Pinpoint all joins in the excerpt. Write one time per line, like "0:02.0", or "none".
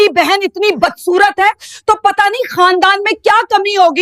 none